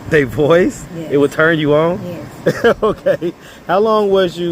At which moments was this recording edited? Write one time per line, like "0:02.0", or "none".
none